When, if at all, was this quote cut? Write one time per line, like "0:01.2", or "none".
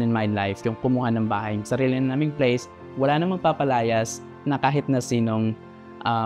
none